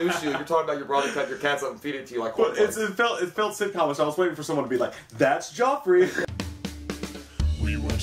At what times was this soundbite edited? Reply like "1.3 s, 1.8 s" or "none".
6.2 s